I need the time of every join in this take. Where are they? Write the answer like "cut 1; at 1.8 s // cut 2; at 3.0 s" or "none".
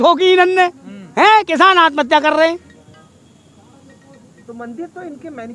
none